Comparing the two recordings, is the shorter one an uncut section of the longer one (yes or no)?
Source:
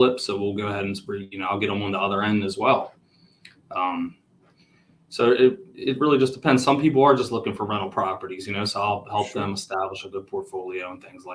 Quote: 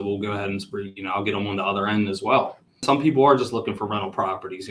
no